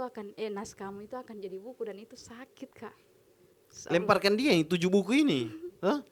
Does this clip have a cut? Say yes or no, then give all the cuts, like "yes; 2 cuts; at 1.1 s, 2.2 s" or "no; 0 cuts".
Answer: no; 0 cuts